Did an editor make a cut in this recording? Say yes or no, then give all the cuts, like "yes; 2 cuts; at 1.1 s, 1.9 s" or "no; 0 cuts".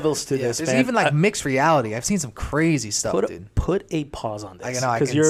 no; 0 cuts